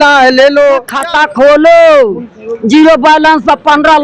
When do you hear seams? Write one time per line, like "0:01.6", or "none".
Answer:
0:01.0